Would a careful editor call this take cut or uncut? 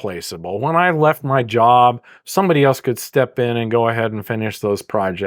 uncut